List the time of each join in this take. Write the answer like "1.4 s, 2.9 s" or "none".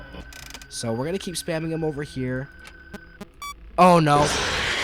none

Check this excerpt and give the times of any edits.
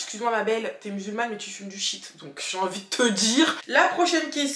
3.6 s

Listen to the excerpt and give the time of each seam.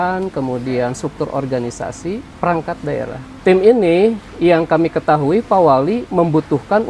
2.3 s, 3.2 s

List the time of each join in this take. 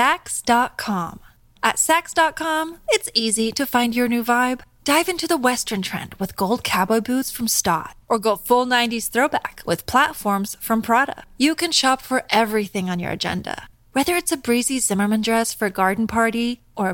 none

